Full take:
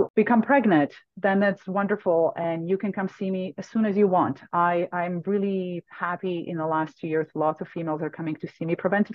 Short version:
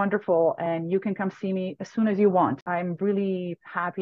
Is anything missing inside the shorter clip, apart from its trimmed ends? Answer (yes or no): yes